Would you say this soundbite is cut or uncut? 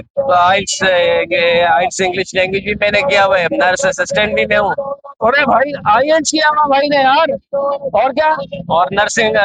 uncut